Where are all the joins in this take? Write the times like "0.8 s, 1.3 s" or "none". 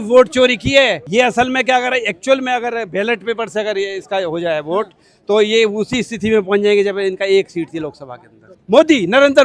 1.0 s, 8.6 s